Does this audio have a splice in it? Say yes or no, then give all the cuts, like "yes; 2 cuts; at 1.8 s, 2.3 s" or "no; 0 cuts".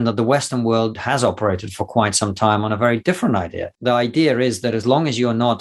yes; 2 cuts; at 1.0 s, 3.6 s